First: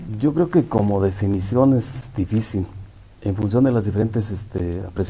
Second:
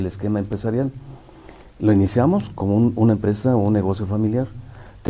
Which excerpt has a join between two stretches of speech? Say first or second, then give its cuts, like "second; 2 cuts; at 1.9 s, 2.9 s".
first; 1 cut; at 3.7 s